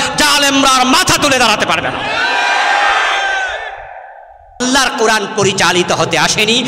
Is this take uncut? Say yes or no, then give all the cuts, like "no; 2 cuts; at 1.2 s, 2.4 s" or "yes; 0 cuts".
no; 1 cut; at 4.6 s